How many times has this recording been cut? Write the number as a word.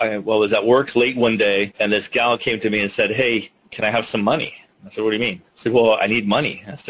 two